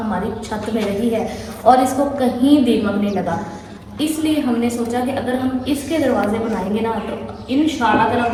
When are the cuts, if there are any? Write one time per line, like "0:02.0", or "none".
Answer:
none

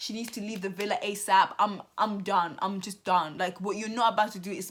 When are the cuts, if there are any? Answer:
none

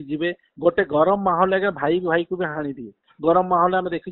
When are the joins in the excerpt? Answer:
none

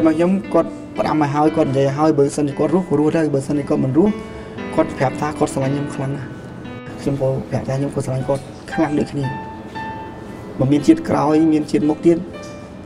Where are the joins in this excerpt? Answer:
0:06.9

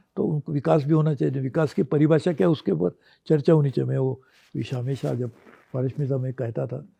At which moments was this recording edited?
none

